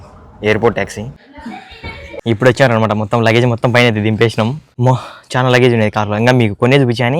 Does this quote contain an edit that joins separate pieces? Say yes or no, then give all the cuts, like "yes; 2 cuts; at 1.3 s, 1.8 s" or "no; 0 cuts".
yes; 2 cuts; at 2.1 s, 4.7 s